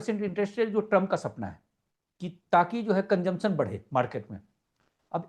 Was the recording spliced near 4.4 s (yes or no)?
no